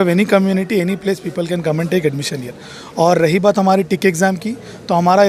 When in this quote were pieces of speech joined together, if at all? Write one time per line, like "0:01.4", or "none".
none